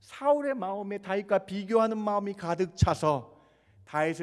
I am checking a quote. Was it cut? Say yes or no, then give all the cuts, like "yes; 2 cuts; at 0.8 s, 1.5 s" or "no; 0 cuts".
no; 0 cuts